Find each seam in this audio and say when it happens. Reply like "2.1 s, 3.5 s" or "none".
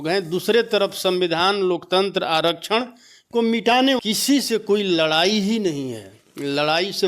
4.0 s